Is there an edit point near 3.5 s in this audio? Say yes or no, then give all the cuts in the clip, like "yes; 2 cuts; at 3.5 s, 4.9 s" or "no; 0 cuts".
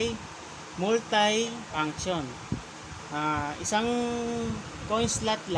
no; 1 cut; at 1.7 s